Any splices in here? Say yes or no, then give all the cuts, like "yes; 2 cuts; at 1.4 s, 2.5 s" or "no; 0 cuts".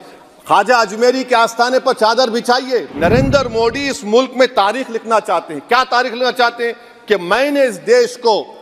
yes; 1 cut; at 2.9 s